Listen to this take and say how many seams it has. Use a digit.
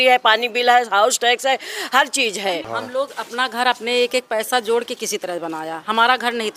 1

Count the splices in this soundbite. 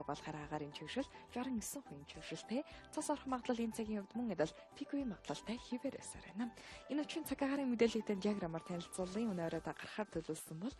1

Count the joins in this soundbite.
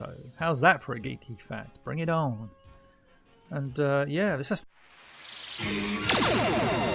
0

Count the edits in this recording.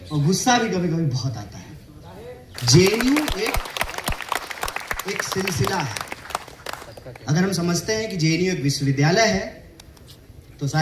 1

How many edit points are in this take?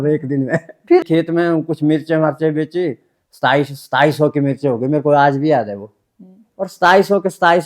1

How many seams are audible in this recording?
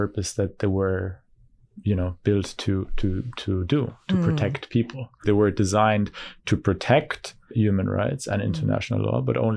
2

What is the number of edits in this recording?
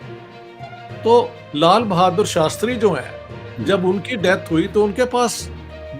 1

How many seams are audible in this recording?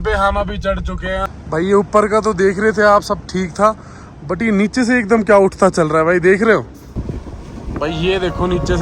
2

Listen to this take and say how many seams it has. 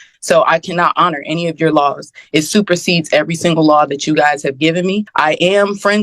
1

